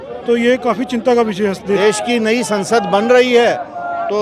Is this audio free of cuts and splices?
no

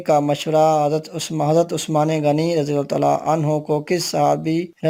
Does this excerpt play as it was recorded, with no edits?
yes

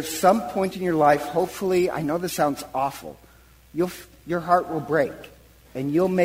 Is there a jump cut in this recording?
no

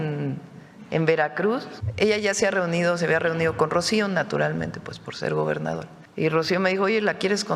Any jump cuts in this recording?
yes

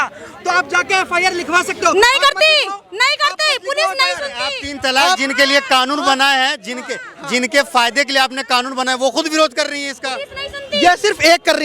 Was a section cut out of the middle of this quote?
no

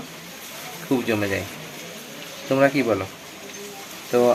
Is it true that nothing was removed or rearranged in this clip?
yes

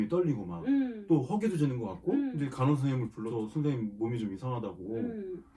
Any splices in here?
yes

